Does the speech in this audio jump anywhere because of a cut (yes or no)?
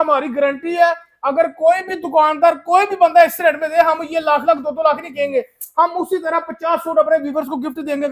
no